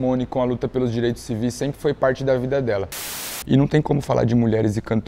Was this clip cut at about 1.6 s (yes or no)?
no